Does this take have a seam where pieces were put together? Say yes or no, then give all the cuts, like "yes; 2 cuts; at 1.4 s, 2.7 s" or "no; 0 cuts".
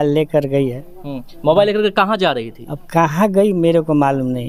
no; 0 cuts